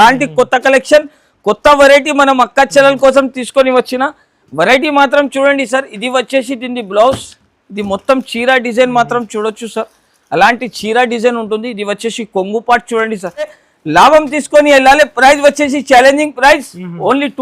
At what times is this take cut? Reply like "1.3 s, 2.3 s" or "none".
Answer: 13.6 s